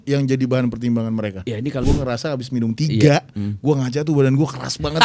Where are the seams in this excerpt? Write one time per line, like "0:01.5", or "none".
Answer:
0:01.8